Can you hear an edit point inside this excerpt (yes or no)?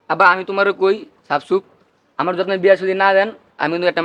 no